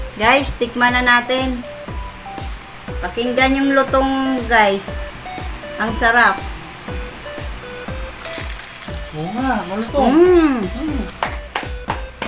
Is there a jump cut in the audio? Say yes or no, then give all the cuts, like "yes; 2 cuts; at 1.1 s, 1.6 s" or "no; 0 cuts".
no; 0 cuts